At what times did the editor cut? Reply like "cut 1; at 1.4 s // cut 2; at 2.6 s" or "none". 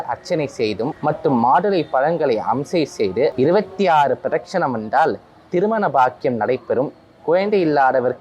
cut 1; at 0.9 s // cut 2; at 3.3 s